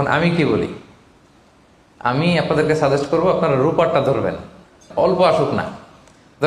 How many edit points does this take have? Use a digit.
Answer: 1